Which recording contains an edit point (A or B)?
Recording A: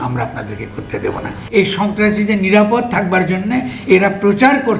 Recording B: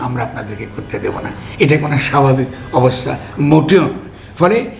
A